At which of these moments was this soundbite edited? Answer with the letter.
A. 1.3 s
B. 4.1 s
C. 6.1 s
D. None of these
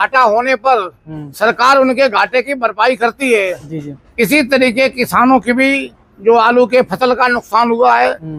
D